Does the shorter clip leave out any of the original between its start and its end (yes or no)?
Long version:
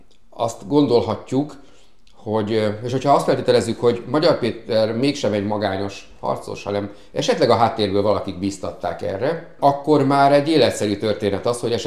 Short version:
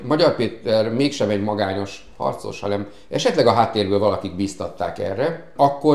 no